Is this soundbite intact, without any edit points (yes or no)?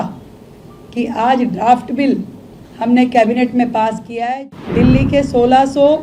no